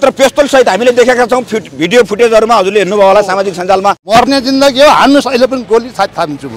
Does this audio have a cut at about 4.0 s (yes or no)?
yes